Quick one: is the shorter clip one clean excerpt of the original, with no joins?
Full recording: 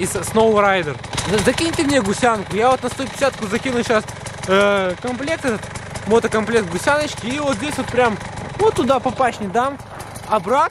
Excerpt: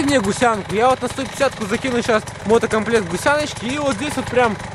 no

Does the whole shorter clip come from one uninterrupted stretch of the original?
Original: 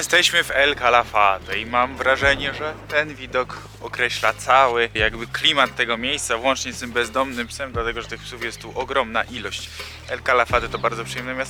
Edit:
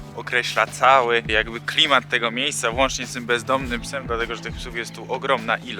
yes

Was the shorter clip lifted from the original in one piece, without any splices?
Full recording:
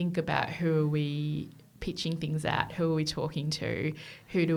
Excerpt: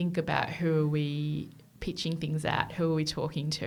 yes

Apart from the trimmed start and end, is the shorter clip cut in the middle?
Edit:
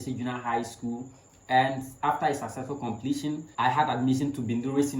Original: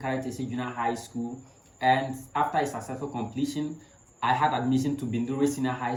yes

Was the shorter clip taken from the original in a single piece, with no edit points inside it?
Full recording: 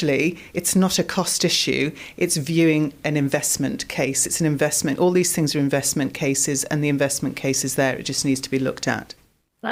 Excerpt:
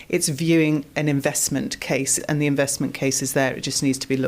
no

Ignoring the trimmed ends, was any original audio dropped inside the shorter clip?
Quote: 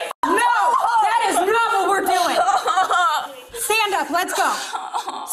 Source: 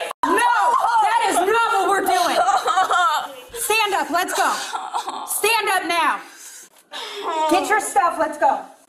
no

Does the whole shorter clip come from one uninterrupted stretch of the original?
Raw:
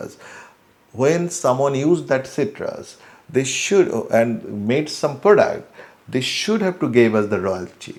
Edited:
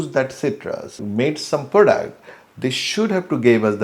no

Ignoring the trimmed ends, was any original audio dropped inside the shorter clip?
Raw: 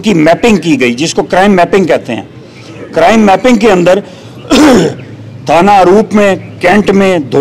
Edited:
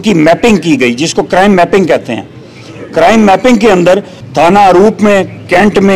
yes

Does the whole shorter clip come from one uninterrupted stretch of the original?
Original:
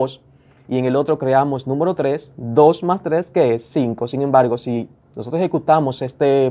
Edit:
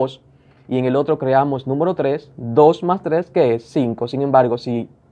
yes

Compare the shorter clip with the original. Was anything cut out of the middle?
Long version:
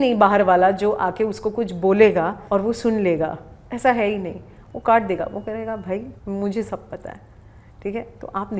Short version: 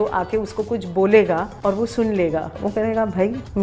yes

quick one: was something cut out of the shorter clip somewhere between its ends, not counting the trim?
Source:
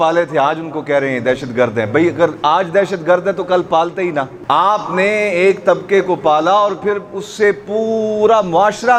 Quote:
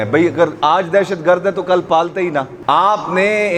no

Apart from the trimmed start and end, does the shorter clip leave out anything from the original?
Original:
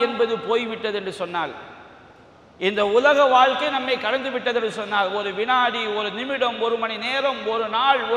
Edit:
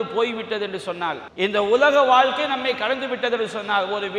yes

